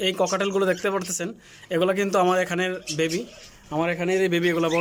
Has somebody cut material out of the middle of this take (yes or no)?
no